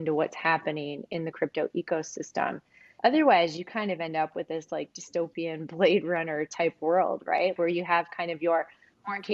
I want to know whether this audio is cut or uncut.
cut